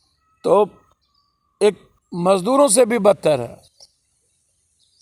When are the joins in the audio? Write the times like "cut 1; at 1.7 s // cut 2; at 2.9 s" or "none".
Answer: none